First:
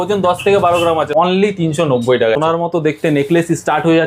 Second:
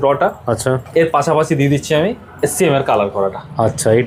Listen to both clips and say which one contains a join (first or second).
first